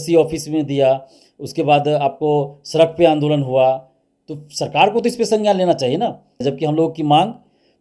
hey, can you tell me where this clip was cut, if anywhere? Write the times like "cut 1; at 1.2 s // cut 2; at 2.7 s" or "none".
cut 1; at 6.4 s